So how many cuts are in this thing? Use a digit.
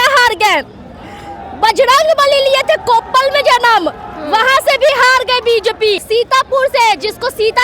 1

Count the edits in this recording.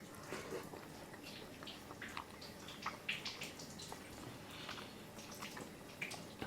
0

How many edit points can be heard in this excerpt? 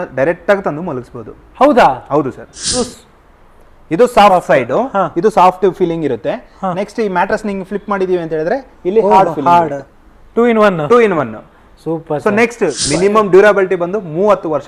2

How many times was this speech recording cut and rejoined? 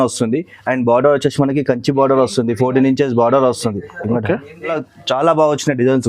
1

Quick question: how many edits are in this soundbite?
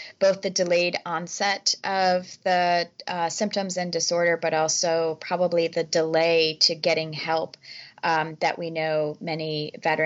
0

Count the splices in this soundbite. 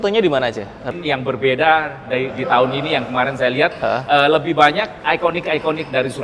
2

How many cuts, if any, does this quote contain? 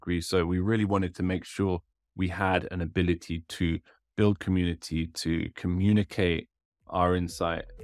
1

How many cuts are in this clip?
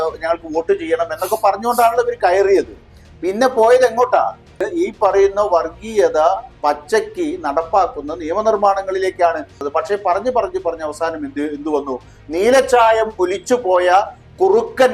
2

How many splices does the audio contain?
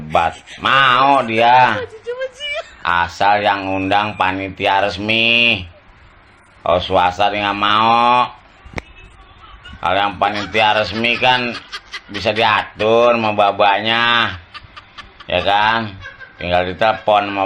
0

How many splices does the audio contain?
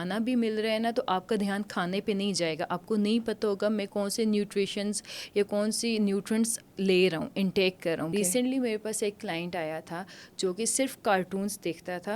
1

